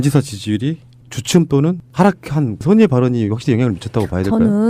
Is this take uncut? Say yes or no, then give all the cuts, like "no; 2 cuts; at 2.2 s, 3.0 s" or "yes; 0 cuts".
yes; 0 cuts